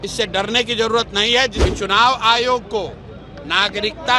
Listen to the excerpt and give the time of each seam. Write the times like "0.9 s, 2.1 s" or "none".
1.6 s